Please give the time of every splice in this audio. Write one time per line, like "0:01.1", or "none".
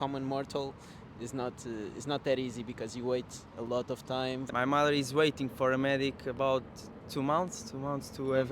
0:04.5